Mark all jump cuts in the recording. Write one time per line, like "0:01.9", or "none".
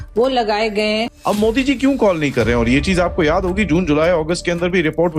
0:01.1

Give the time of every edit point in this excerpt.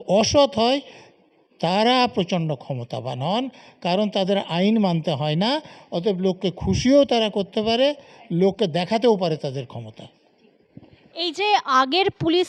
none

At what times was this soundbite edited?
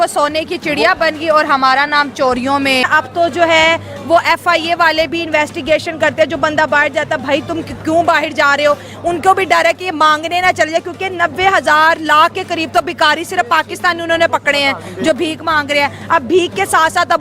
0:02.8

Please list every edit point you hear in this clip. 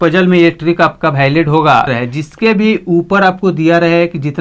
0:02.4

